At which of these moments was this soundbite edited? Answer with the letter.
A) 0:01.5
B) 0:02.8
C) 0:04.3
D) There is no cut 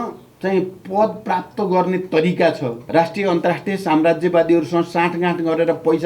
B